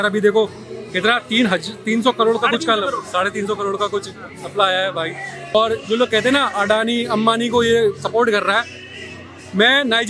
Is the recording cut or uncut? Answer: cut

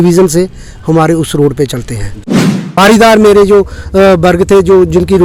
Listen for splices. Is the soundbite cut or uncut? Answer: cut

